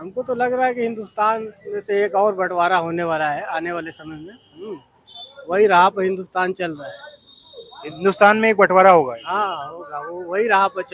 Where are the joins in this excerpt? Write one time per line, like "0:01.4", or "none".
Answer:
none